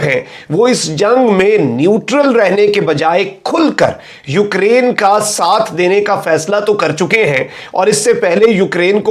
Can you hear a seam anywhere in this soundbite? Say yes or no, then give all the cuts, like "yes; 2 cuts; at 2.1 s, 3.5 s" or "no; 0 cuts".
no; 0 cuts